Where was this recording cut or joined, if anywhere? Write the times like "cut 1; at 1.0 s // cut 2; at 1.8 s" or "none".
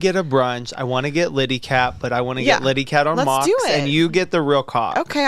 none